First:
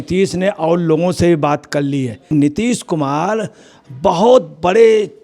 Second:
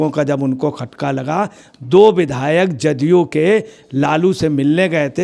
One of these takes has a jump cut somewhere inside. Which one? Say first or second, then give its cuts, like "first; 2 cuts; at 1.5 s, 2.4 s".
first; 1 cut; at 2.3 s